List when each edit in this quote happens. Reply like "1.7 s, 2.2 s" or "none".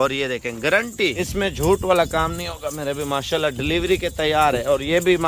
1.3 s

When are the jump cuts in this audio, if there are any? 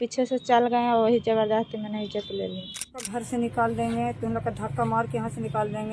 3.1 s

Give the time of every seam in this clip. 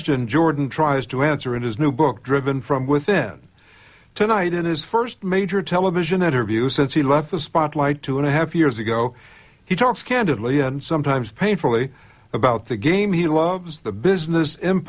4.8 s

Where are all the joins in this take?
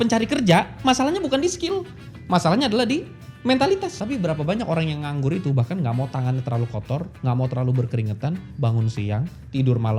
3.9 s

